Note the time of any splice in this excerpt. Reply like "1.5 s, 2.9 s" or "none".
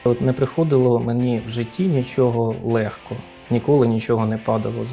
none